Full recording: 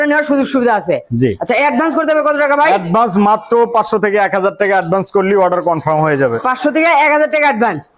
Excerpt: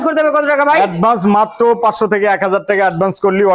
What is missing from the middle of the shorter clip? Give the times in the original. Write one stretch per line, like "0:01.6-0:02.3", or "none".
none